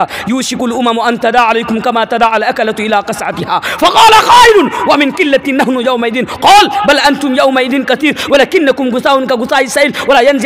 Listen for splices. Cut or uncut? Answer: uncut